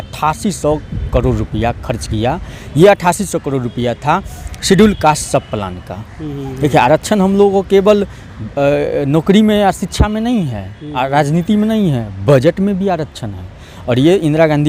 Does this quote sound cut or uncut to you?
uncut